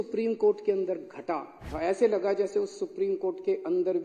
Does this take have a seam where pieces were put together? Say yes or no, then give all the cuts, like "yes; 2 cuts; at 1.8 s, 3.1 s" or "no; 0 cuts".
yes; 1 cut; at 1.6 s